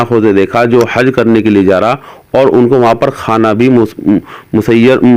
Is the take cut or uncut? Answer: uncut